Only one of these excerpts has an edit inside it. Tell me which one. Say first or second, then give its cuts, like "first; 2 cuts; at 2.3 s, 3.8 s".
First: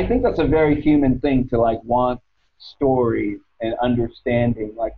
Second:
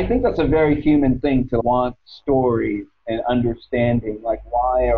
second; 1 cut; at 1.6 s